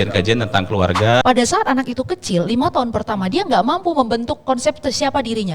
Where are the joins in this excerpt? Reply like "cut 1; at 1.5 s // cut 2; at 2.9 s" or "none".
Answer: cut 1; at 1.2 s

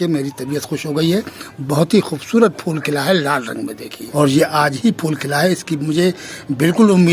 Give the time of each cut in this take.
cut 1; at 4.0 s

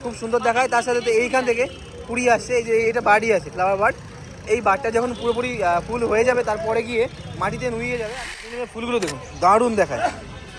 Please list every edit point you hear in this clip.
cut 1; at 8.5 s

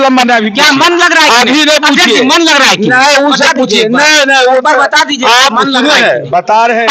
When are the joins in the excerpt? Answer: none

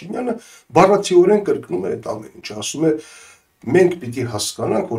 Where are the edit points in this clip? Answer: none

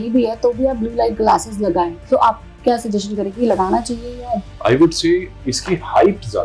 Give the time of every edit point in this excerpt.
cut 1; at 4.3 s // cut 2; at 5.4 s

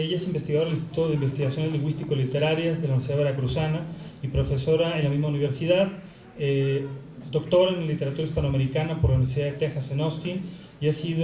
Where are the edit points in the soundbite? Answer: cut 1; at 1.7 s

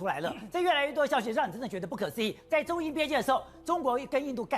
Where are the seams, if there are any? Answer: none

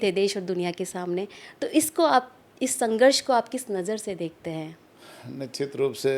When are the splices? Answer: none

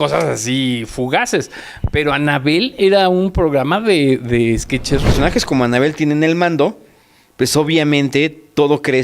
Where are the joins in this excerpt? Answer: cut 1; at 5.1 s

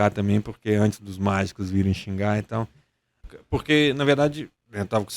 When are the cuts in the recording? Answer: cut 1; at 3.2 s

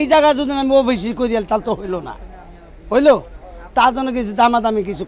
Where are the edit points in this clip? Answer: none

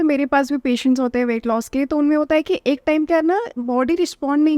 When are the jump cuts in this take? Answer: none

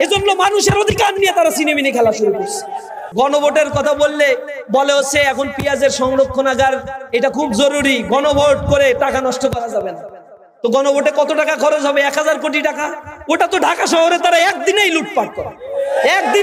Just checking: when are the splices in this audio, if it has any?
cut 1; at 3.0 s

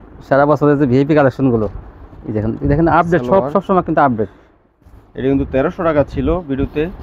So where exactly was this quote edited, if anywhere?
none

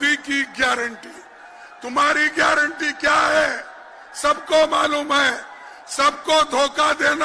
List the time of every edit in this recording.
none

